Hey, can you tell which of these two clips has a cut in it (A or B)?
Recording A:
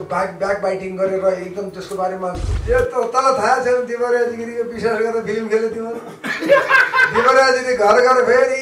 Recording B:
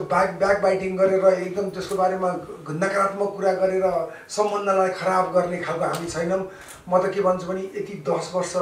A